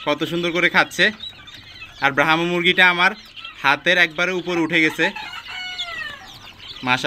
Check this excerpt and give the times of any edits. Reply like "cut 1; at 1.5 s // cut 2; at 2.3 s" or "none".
none